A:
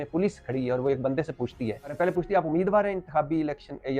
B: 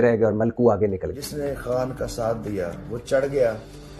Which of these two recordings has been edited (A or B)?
B